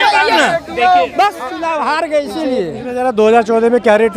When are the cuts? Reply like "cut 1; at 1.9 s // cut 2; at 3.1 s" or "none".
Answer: cut 1; at 1.5 s